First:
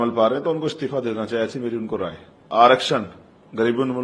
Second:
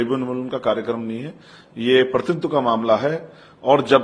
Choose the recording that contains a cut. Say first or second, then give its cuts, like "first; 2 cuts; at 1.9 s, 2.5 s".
first; 1 cut; at 2.4 s